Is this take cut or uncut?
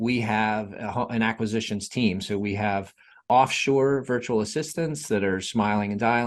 cut